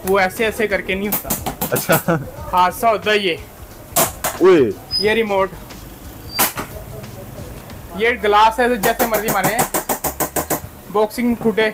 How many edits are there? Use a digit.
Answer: 2